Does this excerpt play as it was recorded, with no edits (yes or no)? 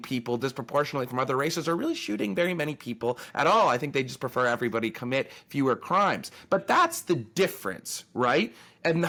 yes